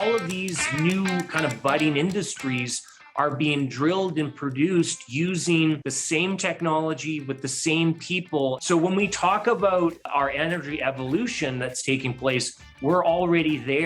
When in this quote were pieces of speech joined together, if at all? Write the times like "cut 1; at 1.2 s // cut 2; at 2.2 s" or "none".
cut 1; at 5.9 s // cut 2; at 8.6 s